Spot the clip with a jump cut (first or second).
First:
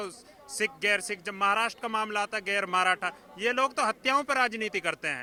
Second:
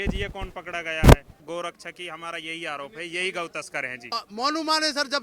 second